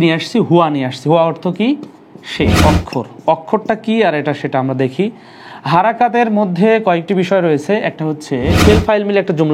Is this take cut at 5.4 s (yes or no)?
no